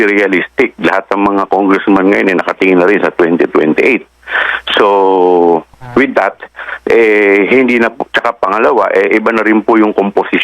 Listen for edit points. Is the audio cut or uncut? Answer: cut